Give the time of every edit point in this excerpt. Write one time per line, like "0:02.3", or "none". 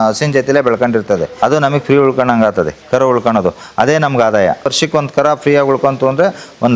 0:01.3
0:02.8
0:04.7